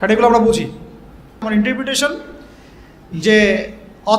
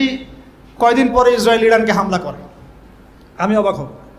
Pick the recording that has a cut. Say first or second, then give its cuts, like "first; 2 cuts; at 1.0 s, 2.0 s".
first; 1 cut; at 1.4 s